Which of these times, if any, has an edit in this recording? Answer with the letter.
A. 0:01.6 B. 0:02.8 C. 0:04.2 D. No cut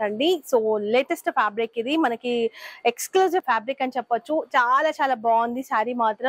D